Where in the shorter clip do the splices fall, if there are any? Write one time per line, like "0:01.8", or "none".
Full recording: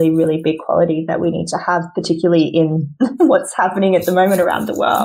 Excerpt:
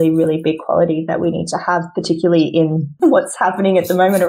0:02.9